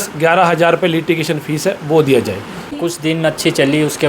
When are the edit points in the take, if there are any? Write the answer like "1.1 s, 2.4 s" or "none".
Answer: 2.7 s